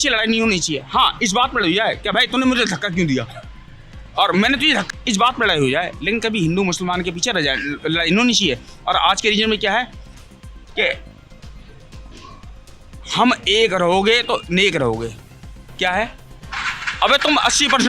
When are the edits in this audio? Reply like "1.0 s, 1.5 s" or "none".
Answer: 4.9 s